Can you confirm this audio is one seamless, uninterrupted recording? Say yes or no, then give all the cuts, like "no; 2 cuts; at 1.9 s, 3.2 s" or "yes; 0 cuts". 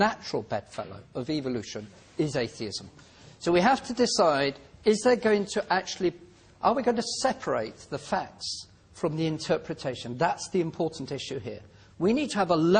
no; 1 cut; at 10.4 s